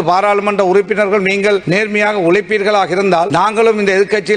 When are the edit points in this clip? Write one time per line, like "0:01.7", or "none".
0:01.6
0:03.3